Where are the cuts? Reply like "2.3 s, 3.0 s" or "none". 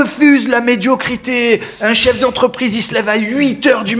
none